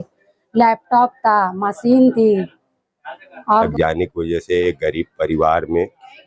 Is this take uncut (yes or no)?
no